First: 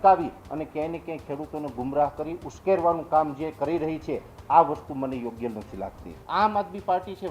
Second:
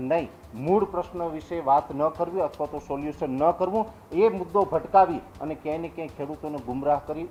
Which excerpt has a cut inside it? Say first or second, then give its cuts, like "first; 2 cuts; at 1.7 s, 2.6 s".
first; 1 cut; at 6.1 s